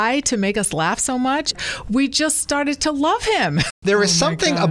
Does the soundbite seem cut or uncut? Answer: cut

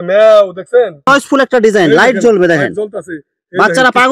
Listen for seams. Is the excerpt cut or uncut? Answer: cut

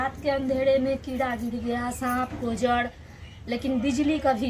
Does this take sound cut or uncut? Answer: uncut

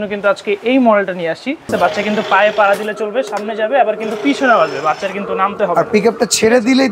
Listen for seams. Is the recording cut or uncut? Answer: cut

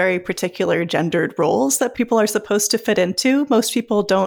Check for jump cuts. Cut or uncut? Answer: cut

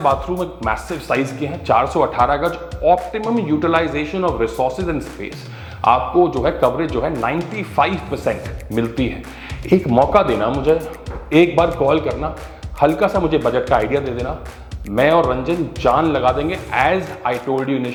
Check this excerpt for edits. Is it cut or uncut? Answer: uncut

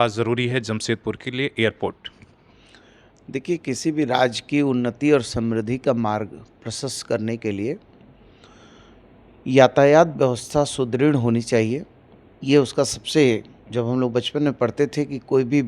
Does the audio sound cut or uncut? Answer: uncut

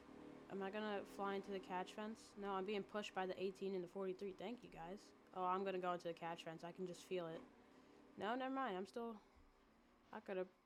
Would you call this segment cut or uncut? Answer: uncut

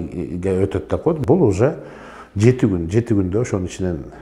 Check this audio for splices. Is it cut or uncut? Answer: cut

